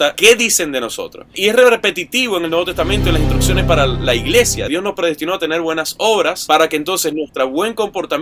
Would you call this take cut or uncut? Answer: cut